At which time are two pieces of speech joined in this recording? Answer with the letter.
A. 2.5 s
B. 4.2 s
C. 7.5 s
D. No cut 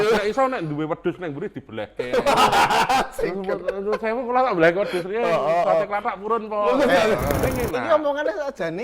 C